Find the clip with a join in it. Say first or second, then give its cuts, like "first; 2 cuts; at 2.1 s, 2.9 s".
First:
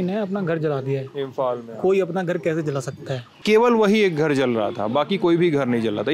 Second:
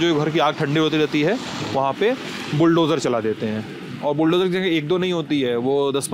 first; 1 cut; at 3.4 s